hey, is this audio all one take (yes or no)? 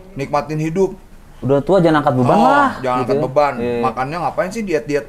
yes